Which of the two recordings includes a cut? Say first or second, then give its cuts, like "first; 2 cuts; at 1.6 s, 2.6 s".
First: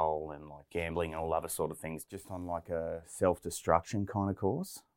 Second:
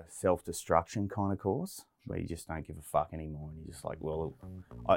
first; 1 cut; at 2.1 s